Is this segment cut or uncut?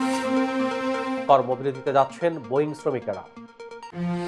uncut